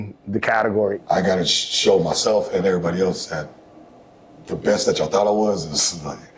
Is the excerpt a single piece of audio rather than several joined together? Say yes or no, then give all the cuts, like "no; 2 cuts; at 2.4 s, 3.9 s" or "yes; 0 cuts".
no; 1 cut; at 1.0 s